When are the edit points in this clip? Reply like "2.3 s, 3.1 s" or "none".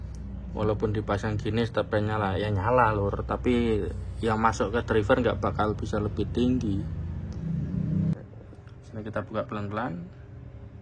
8.1 s